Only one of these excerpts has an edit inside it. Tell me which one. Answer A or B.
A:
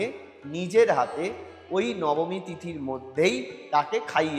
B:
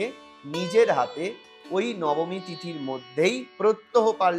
A